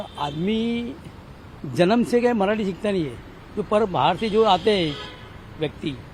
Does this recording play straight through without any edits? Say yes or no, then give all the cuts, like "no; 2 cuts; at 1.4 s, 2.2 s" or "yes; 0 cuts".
yes; 0 cuts